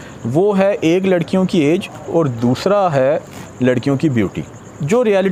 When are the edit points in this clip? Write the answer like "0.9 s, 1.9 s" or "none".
none